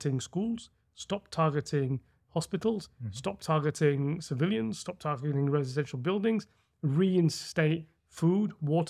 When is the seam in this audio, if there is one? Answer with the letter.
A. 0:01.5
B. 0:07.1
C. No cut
C